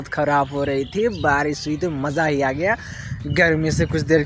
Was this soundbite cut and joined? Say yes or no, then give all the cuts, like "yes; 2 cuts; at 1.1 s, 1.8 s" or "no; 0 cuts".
no; 0 cuts